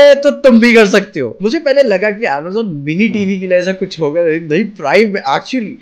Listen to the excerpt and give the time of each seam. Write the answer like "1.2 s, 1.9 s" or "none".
1.3 s